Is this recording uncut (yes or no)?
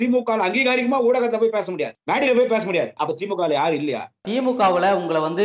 no